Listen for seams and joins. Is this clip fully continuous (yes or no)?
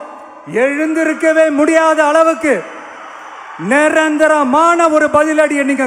yes